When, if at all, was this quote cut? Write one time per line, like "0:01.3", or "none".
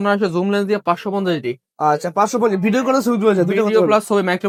none